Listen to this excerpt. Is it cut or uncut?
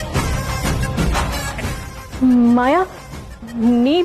cut